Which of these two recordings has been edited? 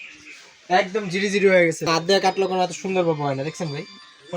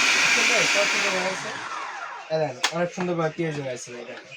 first; 1 cut; at 1.8 s

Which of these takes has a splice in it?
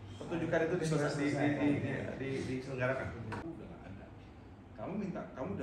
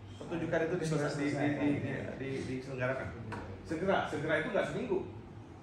first; 1 cut; at 3.4 s

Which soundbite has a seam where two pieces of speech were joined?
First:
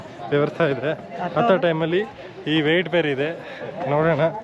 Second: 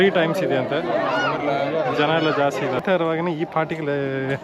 second; 1 cut; at 2.8 s

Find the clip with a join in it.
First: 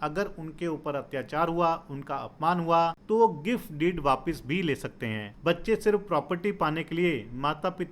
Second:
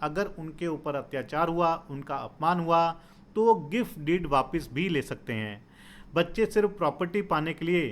first; 2 cuts; at 3.0 s, 5.3 s

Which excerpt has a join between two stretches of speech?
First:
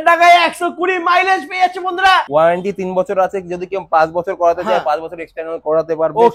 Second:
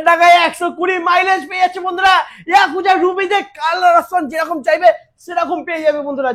first; 1 cut; at 2.3 s

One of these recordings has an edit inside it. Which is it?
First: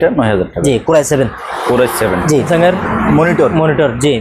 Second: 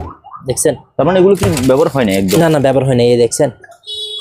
first; 1 cut; at 2.5 s

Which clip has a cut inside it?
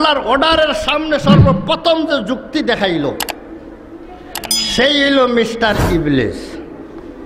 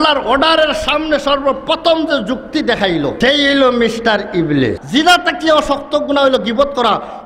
second; 2 cuts; at 3.1 s, 4.8 s

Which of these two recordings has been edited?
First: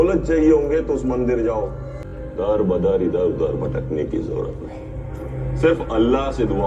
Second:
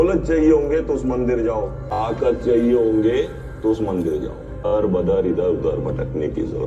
first; 1 cut; at 1.9 s

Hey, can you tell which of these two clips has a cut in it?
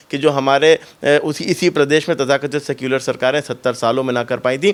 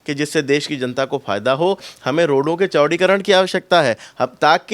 second; 1 cut; at 1.8 s

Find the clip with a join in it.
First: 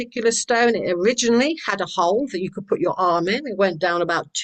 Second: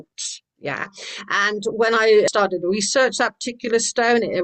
second; 1 cut; at 2.3 s

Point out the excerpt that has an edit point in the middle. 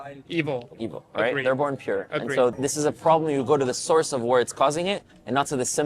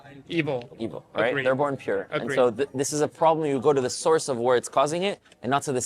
first; 1 cut; at 2.5 s

